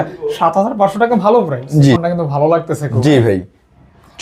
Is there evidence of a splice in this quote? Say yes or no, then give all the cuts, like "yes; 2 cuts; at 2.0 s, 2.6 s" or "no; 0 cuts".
yes; 1 cut; at 2.0 s